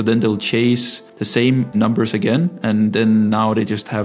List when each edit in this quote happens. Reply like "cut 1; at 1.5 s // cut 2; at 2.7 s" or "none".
cut 1; at 1.5 s